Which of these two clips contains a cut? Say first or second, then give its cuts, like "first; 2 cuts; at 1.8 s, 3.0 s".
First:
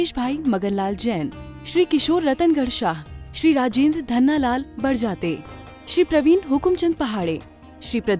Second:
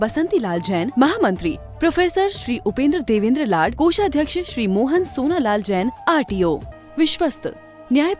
second; 1 cut; at 6.7 s